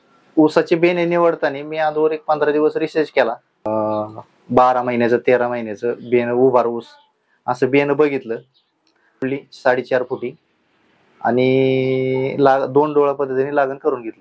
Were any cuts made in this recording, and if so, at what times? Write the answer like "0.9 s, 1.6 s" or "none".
3.7 s, 9.2 s